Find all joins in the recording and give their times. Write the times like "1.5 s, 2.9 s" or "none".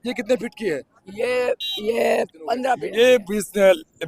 2.7 s